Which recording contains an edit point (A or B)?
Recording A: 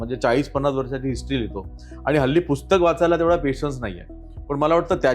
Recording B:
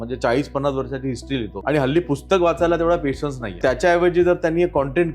B